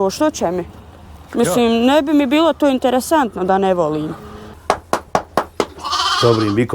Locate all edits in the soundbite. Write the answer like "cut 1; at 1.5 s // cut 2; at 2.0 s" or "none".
cut 1; at 4.5 s